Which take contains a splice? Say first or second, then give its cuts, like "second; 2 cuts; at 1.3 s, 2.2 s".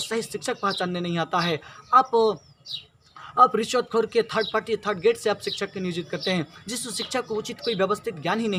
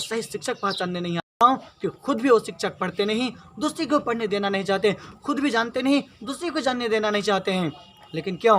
second; 1 cut; at 1.3 s